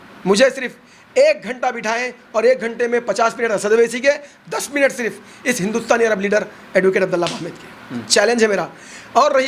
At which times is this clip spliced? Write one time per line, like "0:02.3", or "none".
none